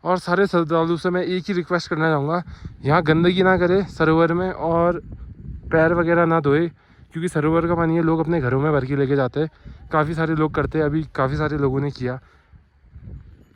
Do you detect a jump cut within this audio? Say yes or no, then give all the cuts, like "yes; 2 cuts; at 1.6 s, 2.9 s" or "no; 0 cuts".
no; 0 cuts